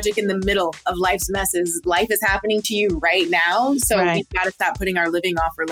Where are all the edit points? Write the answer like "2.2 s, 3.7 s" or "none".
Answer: none